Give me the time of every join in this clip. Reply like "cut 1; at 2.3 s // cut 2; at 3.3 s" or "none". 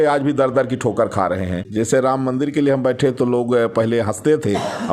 cut 1; at 1.7 s